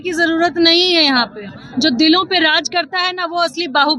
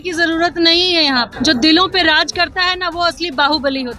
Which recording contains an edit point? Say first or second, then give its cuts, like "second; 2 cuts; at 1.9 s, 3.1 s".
second; 1 cut; at 1.3 s